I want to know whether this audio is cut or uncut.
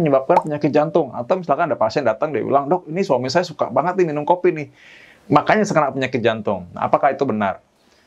uncut